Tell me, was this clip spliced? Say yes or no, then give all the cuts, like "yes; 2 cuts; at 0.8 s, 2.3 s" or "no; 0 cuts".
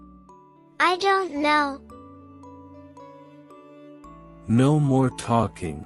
no; 0 cuts